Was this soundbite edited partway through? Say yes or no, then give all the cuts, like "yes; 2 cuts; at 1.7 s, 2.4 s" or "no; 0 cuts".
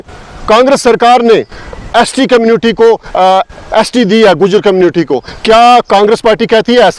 no; 0 cuts